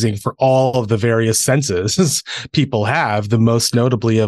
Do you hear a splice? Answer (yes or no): no